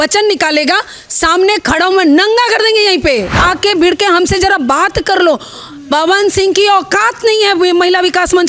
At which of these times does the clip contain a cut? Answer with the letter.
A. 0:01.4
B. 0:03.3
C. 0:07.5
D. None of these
B